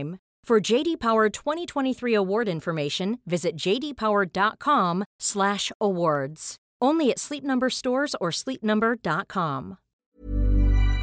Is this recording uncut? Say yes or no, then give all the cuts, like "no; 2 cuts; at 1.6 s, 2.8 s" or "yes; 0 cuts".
no; 1 cut; at 10.1 s